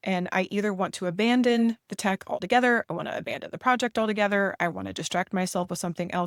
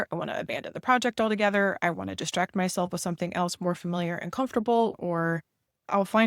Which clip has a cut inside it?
second; 1 cut; at 4.9 s

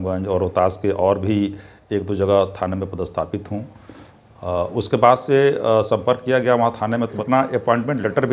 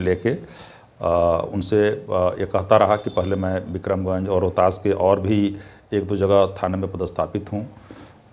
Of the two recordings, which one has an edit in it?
first; 1 cut; at 7.2 s

